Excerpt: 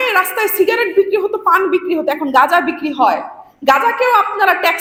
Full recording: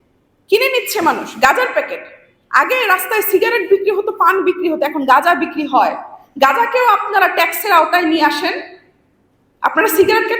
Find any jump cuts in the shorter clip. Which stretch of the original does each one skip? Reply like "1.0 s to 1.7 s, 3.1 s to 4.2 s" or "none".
none